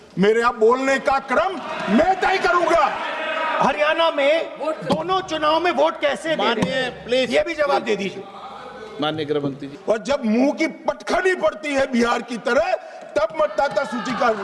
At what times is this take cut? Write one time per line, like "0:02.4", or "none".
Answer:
0:03.0
0:09.7